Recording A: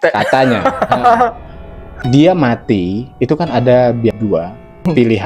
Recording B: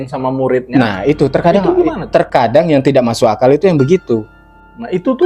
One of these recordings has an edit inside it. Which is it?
A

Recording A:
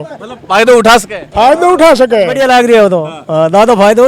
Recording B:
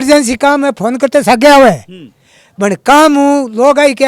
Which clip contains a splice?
A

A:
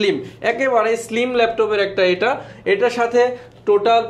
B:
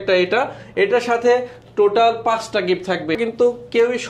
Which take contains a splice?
B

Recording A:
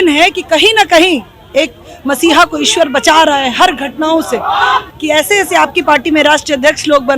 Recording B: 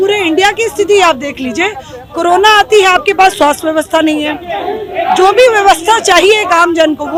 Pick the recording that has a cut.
A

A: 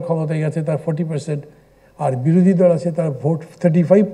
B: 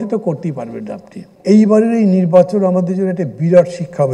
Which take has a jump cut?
B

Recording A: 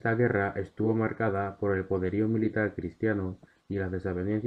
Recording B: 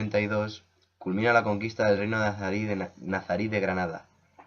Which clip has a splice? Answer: B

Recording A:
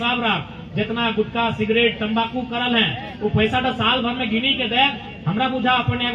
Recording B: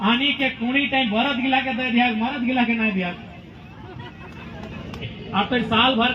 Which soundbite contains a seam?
B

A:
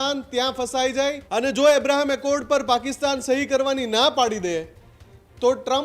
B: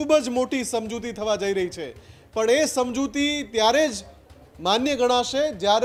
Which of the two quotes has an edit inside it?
A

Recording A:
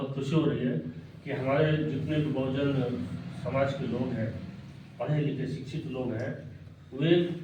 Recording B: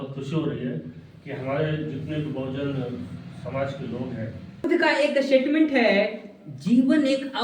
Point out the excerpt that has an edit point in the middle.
B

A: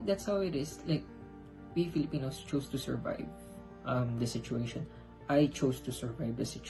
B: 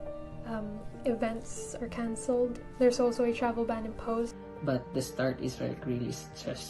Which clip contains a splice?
B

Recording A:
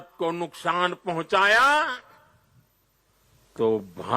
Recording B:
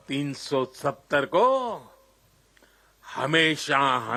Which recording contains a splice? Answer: A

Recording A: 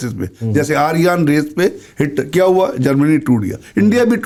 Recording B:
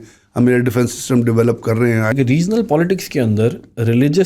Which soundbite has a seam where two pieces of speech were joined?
B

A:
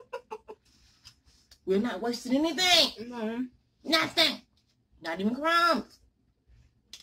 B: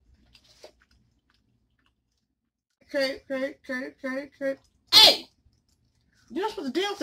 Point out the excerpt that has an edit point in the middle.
B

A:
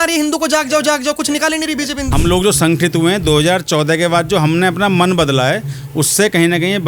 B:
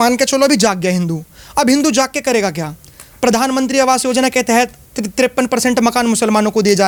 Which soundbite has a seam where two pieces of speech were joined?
A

